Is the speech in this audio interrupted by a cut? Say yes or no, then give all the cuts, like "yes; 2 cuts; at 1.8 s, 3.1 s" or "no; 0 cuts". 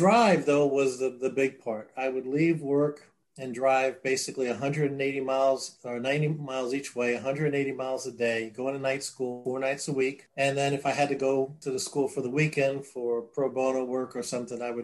yes; 3 cuts; at 9.4 s, 10.2 s, 11.6 s